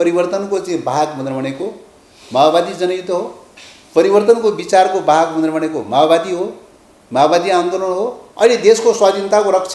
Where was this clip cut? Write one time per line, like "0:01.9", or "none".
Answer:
0:08.2